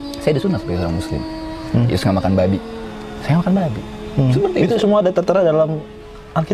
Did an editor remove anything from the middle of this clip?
no; 0 cuts

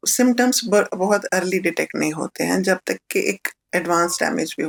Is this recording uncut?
yes; 0 cuts

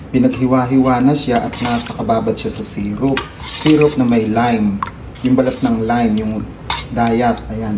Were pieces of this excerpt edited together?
no; 0 cuts

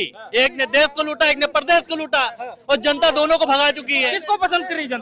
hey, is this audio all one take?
yes; 0 cuts

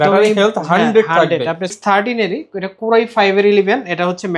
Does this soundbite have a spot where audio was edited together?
yes; 1 cut; at 1.7 s

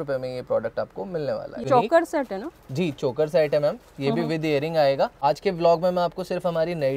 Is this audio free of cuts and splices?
no; 2 cuts; at 1.6 s, 5.2 s

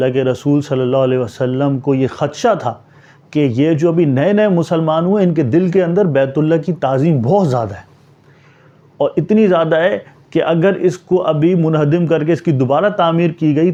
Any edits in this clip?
no; 0 cuts

